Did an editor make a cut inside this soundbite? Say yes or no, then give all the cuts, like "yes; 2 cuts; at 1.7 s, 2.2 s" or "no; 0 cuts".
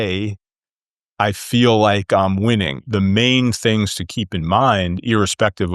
yes; 1 cut; at 2.8 s